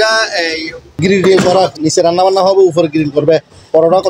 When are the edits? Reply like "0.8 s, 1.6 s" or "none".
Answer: 1.0 s